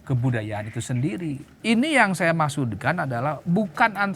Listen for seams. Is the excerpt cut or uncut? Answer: cut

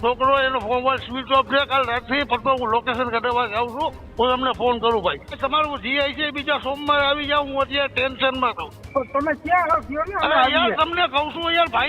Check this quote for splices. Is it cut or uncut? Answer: cut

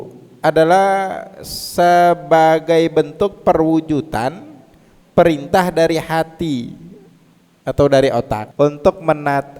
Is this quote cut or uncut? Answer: cut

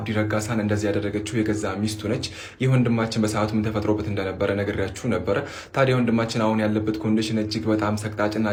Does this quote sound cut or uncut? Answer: uncut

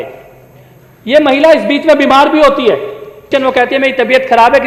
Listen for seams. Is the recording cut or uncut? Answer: cut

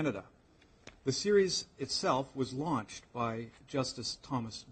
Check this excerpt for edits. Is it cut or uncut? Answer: uncut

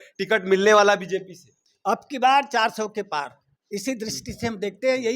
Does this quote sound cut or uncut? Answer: cut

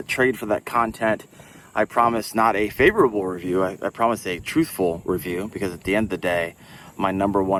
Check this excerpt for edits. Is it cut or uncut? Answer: uncut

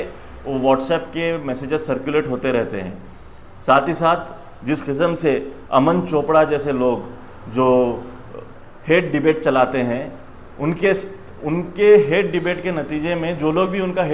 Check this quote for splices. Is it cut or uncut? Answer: uncut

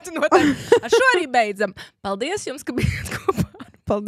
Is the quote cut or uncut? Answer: uncut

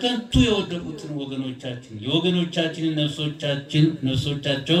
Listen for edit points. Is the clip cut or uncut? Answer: uncut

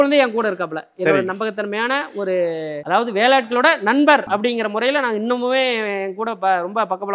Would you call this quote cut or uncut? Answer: uncut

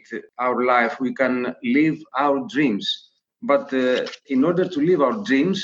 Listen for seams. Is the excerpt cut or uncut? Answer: cut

